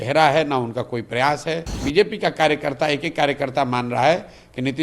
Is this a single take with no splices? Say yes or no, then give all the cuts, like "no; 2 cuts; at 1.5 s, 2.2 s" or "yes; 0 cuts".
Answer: no; 1 cut; at 1.8 s